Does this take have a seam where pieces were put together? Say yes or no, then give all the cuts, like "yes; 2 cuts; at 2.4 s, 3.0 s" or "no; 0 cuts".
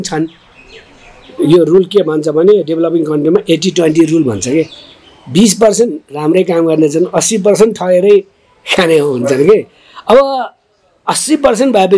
no; 0 cuts